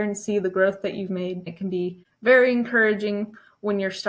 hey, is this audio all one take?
no; 1 cut; at 1.8 s

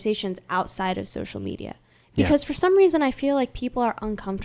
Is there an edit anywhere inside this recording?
no; 0 cuts

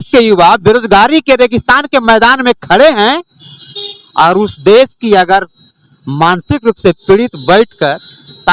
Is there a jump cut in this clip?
no; 0 cuts

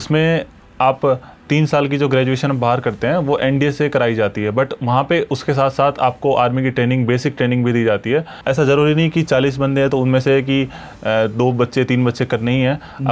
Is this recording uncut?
no; 1 cut; at 8.3 s

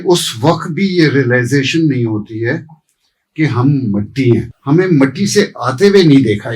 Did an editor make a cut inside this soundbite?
yes; 1 cut; at 4.5 s

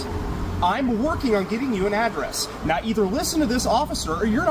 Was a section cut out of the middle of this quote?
no; 0 cuts

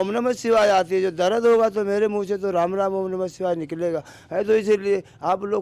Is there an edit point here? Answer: no; 0 cuts

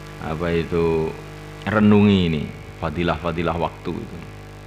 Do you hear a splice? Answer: yes; 1 cut; at 1.8 s

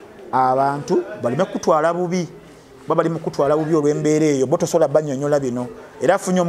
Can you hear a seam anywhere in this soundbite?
no; 0 cuts

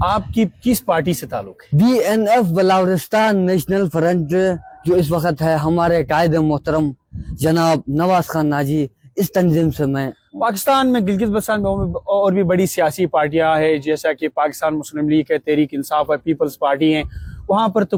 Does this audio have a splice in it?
no; 0 cuts

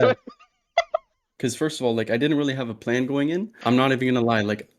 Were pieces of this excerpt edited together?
yes; 2 cuts; at 1.2 s, 3.5 s

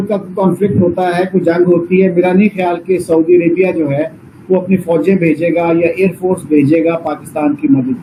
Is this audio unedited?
yes; 0 cuts

